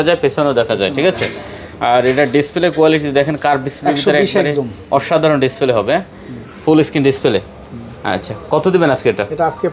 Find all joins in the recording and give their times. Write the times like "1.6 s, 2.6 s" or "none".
none